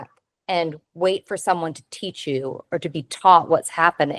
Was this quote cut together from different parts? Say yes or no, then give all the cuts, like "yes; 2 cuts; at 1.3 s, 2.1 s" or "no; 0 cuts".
no; 0 cuts